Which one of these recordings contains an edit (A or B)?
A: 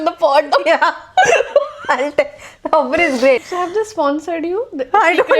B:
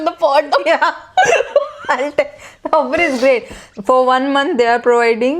A